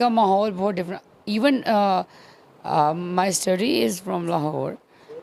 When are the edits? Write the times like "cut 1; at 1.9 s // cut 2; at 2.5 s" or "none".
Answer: none